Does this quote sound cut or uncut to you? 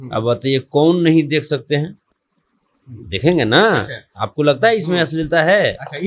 uncut